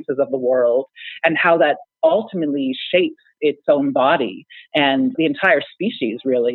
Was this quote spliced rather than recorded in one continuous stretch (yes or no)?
yes